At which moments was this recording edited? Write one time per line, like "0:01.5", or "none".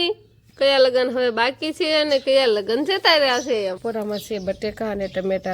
0:03.8

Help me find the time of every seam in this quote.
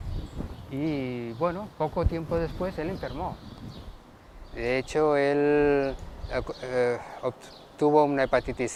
none

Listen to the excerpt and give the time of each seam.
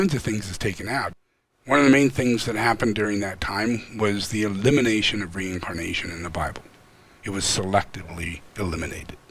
0:01.1

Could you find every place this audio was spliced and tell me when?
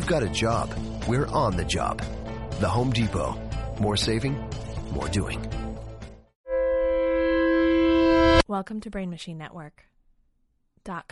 0:06.5
0:08.4

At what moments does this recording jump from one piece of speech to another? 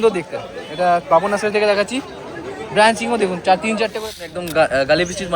0:04.0

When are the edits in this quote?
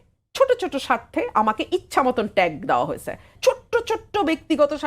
0:03.3

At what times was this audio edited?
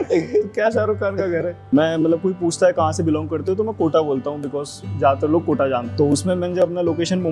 0:01.6
0:05.9

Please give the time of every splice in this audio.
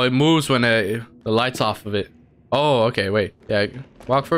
0:01.1
0:03.4

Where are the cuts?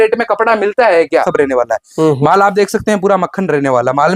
0:01.3

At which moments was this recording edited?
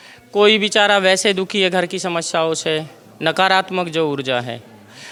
none

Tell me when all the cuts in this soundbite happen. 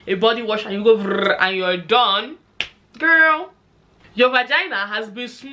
0:04.0

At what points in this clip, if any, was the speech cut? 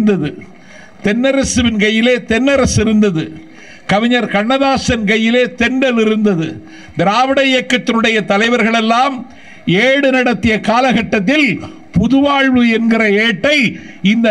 none

